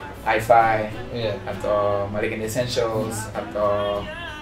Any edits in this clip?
no; 0 cuts

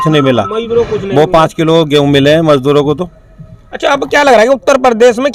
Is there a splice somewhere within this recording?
no; 0 cuts

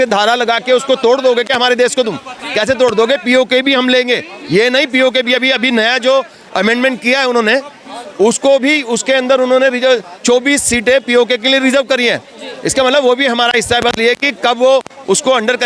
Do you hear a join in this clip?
no; 0 cuts

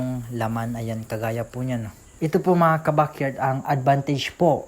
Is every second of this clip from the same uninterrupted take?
no; 1 cut; at 2.0 s

